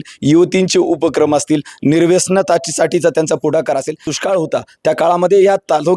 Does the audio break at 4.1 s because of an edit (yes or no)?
yes